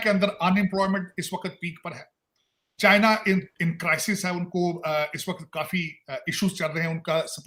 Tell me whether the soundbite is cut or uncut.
uncut